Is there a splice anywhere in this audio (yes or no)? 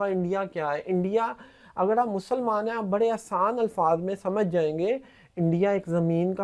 no